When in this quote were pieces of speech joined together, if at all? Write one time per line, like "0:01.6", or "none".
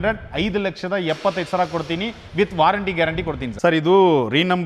0:03.6